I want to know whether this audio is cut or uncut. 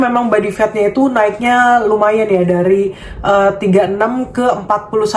uncut